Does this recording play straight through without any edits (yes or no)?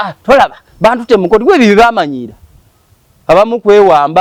yes